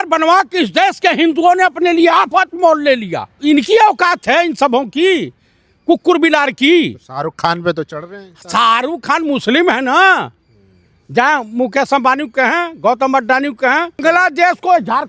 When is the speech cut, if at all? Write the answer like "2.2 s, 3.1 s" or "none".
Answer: 3.3 s, 14.0 s